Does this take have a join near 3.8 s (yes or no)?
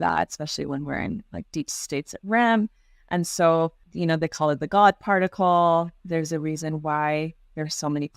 yes